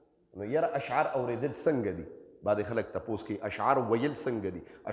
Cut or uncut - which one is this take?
uncut